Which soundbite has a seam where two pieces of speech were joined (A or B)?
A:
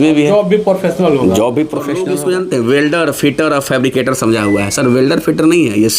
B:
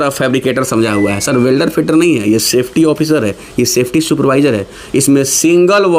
A